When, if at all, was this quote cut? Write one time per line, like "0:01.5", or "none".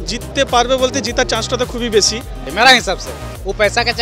0:02.4